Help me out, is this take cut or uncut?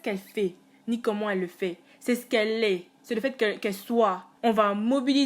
cut